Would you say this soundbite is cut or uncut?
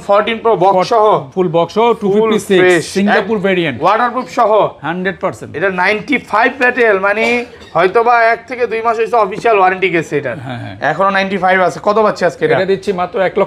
uncut